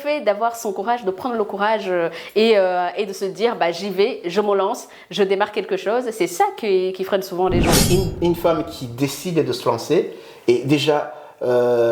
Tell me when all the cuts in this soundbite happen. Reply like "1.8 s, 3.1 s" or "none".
7.8 s